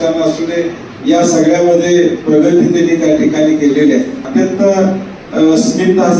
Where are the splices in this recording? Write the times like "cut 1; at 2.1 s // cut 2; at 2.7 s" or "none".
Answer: cut 1; at 4.2 s